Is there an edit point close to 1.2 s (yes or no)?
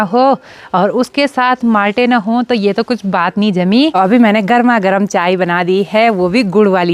no